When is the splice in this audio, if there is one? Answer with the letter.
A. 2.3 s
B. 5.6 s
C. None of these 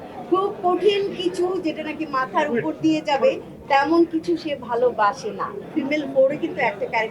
B